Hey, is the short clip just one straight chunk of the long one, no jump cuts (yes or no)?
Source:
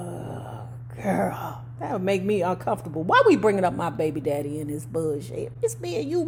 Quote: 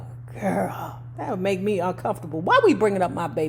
yes